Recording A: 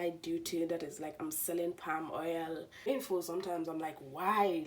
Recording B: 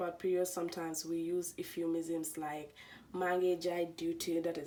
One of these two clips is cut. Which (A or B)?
A